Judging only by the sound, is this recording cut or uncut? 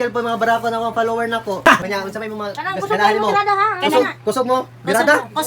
cut